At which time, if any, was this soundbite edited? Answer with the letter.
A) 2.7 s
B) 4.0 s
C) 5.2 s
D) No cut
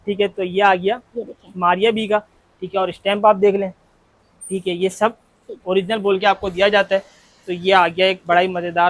D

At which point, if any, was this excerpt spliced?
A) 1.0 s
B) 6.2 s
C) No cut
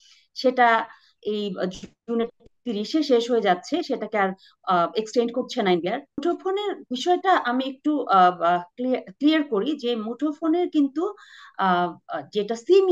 B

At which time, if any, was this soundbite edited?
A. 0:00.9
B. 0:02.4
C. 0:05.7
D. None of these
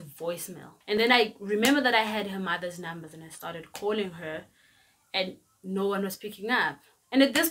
A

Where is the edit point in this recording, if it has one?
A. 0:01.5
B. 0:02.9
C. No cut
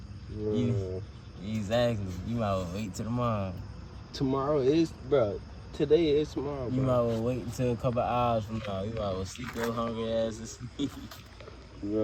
C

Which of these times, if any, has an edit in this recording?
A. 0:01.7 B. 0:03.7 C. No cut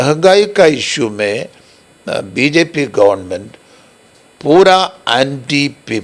C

